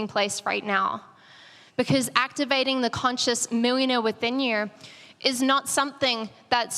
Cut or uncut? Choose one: uncut